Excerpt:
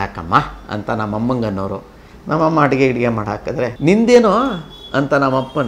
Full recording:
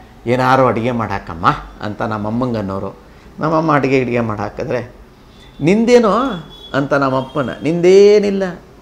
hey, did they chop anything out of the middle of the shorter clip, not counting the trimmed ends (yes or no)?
yes